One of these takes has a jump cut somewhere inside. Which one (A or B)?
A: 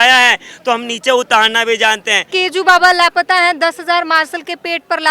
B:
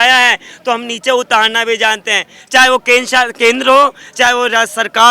A